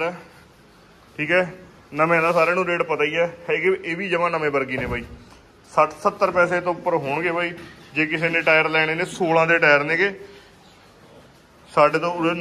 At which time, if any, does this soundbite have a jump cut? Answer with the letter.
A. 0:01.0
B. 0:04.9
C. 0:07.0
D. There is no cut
D